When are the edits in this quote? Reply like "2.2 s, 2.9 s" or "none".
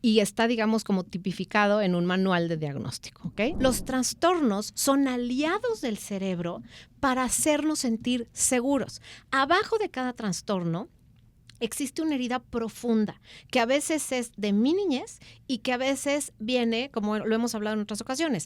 3.6 s